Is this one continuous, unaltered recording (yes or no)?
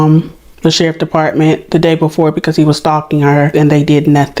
no